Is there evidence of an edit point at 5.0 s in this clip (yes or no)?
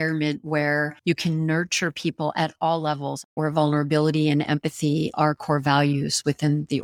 no